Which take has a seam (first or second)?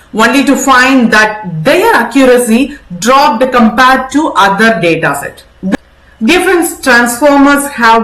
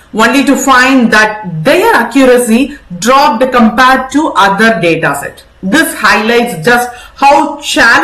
first